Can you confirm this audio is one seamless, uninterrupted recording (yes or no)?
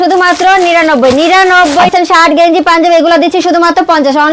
no